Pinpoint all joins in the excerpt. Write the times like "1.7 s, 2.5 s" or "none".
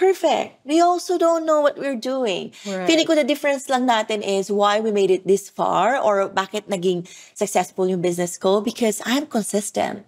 none